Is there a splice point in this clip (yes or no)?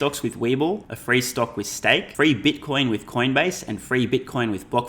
yes